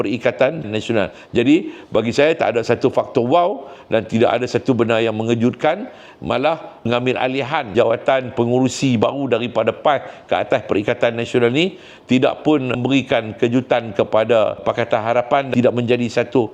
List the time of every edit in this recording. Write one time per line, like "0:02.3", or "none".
0:06.8
0:14.6